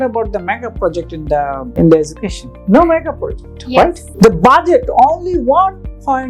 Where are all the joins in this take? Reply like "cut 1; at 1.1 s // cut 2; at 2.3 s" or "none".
cut 1; at 1.7 s // cut 2; at 4.0 s